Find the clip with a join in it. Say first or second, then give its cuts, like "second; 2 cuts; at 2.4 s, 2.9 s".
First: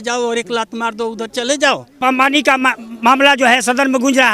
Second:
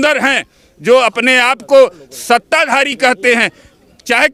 first; 1 cut; at 2.0 s